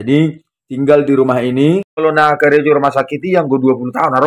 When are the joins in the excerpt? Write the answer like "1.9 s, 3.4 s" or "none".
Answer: 1.9 s